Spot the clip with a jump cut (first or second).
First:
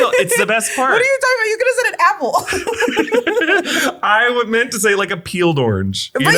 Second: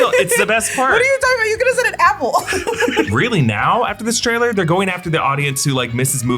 second